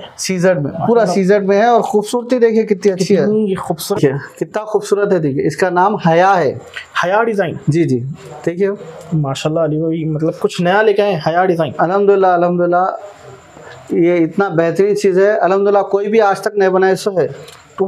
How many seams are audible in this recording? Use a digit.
1